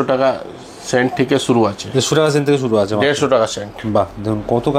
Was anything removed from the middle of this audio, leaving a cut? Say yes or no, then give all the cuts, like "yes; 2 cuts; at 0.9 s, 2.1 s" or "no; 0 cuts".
no; 0 cuts